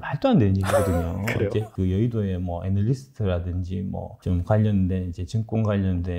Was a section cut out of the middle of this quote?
yes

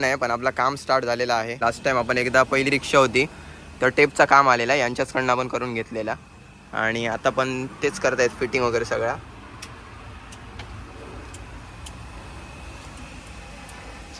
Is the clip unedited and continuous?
no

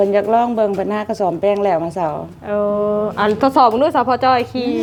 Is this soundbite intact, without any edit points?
yes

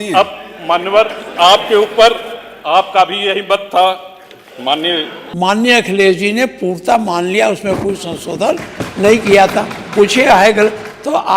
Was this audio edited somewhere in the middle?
yes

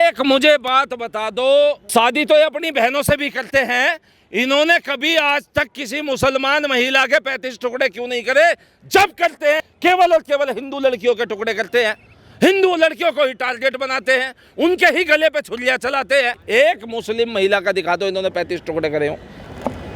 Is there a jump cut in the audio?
yes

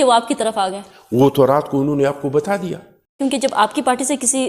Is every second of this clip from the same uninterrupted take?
no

